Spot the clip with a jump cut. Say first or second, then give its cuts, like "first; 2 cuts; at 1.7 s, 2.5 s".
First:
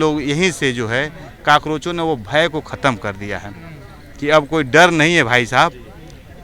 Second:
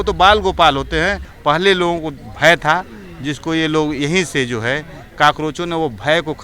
second; 1 cut; at 1.3 s